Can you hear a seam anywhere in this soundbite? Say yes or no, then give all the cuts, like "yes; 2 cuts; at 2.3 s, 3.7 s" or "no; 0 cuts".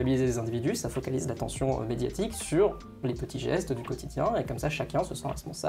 no; 0 cuts